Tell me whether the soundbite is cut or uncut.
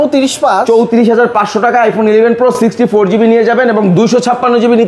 uncut